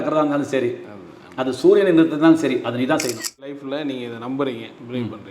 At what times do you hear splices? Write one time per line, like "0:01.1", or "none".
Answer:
0:03.6